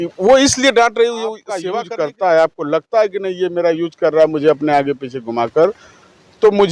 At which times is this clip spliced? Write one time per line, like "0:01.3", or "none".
0:01.6